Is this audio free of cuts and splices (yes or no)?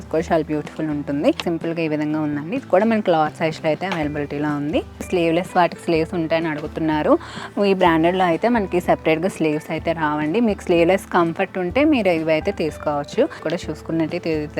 no